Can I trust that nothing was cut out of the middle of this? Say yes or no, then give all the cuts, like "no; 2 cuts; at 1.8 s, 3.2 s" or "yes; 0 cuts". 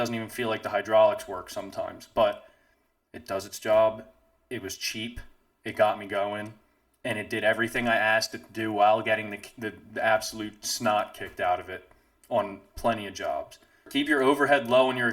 no; 1 cut; at 13.9 s